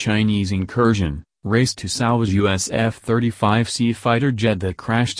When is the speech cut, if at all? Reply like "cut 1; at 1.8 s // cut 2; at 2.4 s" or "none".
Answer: cut 1; at 1.7 s